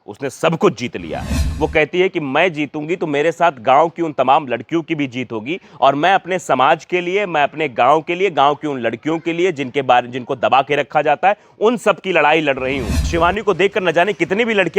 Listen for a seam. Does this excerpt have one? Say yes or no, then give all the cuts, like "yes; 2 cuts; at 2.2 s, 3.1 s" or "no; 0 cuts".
yes; 2 cuts; at 1.4 s, 13.1 s